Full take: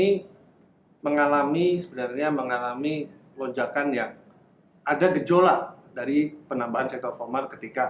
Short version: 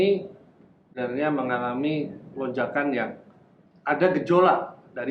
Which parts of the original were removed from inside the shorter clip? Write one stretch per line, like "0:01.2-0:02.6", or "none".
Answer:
0:00.9-0:01.9